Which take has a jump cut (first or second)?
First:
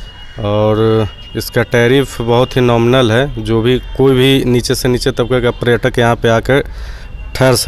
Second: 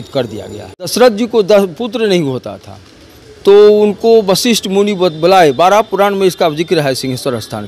second